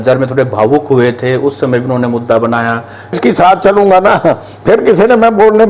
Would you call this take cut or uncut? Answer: cut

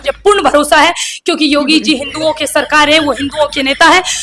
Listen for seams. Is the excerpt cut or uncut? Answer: uncut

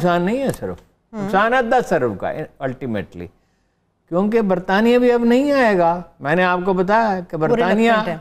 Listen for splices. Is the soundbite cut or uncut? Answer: uncut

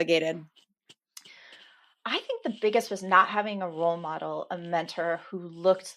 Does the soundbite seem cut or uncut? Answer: uncut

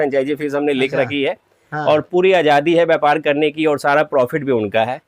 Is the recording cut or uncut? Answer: uncut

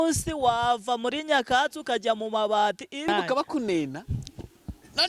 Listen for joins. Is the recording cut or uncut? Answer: cut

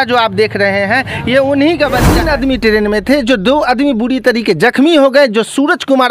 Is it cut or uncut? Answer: cut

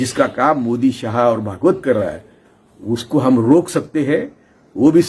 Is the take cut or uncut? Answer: uncut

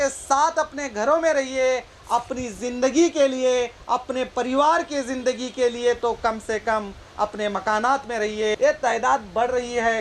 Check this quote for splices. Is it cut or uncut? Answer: cut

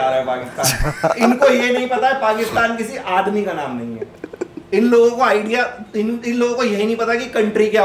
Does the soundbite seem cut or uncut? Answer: uncut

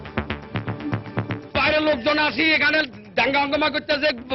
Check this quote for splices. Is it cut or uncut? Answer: cut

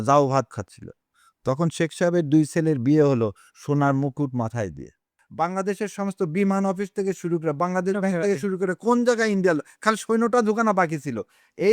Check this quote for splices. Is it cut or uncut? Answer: cut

